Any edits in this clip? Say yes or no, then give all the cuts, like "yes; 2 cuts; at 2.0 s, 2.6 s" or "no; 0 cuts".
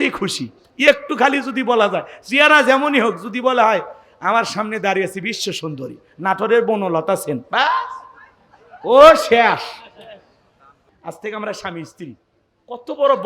yes; 1 cut; at 10.9 s